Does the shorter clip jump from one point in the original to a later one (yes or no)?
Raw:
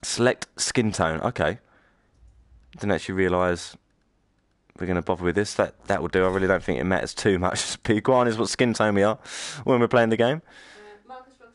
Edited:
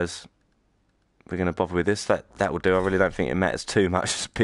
no